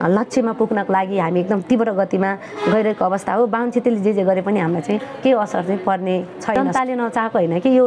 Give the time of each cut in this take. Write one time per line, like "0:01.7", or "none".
0:06.6

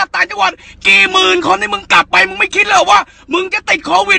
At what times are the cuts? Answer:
none

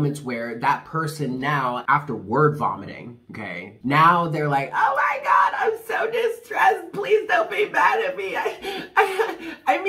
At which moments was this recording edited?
0:01.8
0:03.7

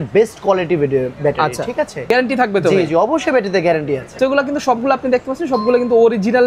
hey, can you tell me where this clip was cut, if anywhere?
0:02.1
0:04.2

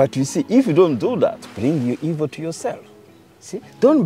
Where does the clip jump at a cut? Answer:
0:01.5

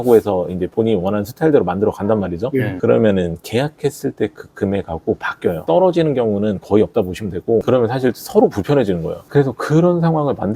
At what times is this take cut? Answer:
0:07.6

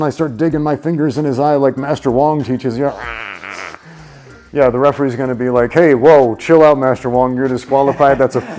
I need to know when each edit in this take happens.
none

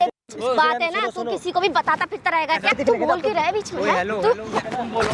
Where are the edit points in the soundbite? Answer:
0:02.8

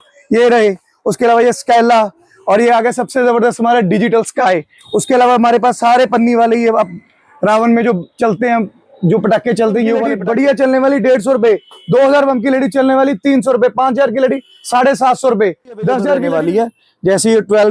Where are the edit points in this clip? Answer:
none

